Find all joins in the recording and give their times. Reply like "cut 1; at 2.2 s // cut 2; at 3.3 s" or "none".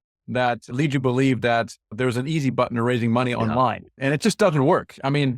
cut 1; at 4.0 s

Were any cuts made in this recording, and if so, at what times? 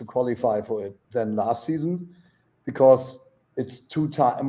cut 1; at 1.0 s

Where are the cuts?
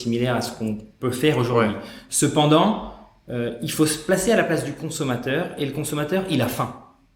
none

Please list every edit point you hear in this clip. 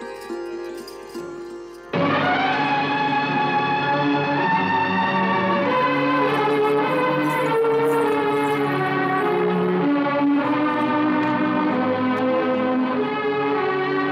cut 1; at 5.5 s

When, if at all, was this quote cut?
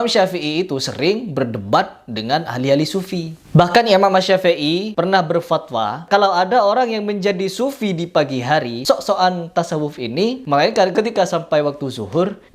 cut 1; at 6.1 s // cut 2; at 8.8 s

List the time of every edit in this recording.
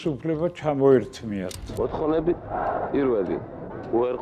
cut 1; at 1.6 s

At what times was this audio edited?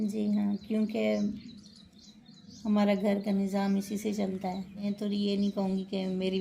cut 1; at 4.8 s

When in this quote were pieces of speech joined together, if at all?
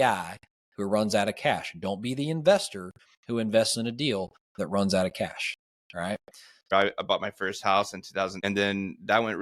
cut 1; at 6.7 s // cut 2; at 8.4 s

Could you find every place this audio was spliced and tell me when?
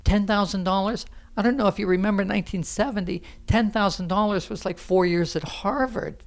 none

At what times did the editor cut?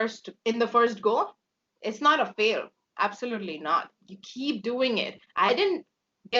none

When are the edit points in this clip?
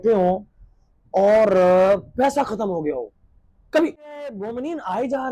none

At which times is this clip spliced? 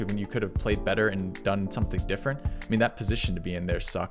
none

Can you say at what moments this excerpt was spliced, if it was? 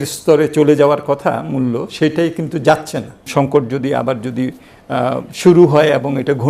cut 1; at 3.3 s

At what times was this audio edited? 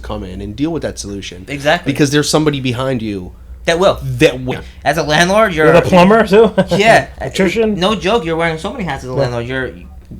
cut 1; at 4.5 s

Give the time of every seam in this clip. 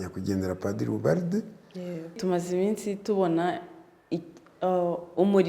cut 1; at 2.2 s

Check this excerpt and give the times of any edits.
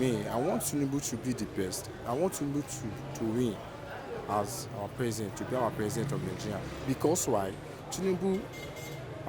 none

